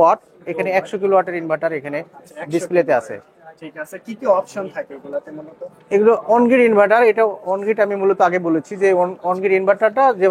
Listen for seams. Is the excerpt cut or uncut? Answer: uncut